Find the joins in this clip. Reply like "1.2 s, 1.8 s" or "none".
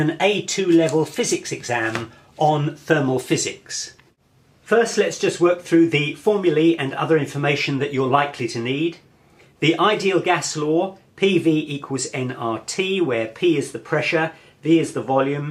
none